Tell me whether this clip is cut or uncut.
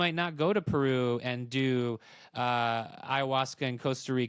uncut